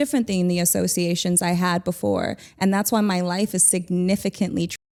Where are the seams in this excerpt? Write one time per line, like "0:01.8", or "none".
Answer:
none